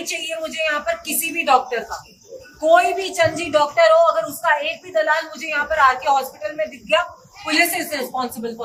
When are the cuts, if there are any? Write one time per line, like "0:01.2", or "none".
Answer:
none